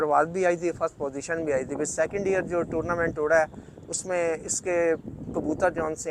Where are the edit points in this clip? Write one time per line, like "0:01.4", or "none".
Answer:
none